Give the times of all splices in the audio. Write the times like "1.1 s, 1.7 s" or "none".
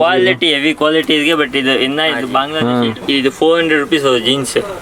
2.5 s